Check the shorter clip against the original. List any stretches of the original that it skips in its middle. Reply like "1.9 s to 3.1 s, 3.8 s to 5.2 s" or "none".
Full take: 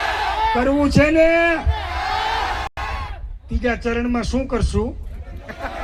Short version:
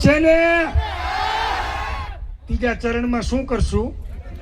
2.7 s to 2.8 s